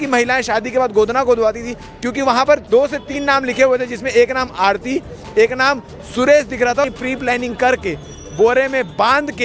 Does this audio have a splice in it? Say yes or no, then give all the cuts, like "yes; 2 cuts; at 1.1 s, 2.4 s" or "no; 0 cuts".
yes; 1 cut; at 6.8 s